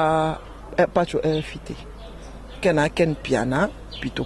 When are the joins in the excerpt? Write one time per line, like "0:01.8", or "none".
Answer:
none